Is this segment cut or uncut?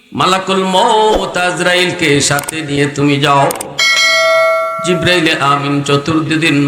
cut